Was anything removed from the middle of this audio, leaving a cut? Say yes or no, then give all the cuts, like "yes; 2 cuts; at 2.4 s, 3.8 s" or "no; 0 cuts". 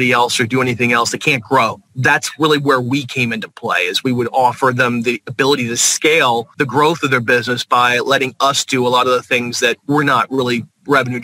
yes; 2 cuts; at 1.9 s, 6.5 s